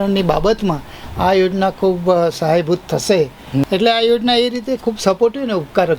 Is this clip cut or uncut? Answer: cut